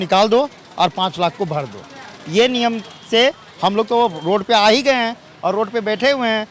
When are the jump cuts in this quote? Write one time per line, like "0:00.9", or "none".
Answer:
none

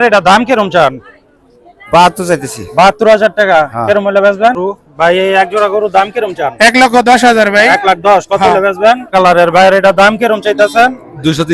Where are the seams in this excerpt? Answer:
0:04.6
0:09.1

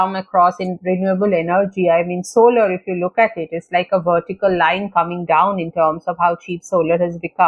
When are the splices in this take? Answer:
none

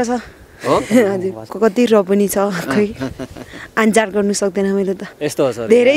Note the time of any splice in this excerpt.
0:01.5
0:05.0

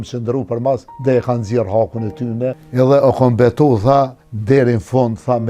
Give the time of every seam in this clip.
0:00.9
0:02.6
0:04.3

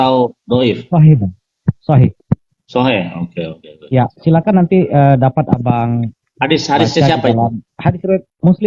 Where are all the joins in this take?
0:02.2
0:04.2
0:07.7

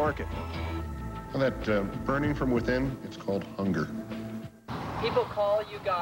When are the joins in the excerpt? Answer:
0:04.6

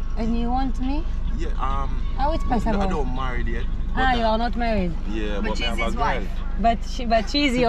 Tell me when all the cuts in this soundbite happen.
none

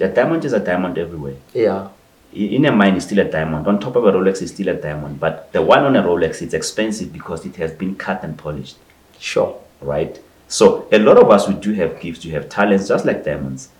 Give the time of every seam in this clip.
none

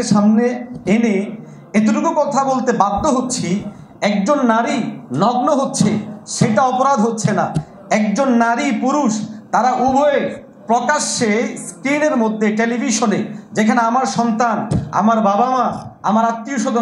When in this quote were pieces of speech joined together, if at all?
none

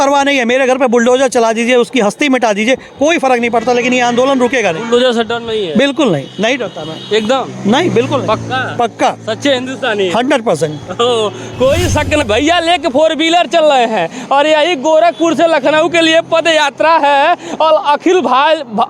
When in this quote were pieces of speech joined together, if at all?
0:12.3

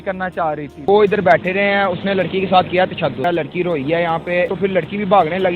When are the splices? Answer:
0:00.8
0:03.2
0:04.5

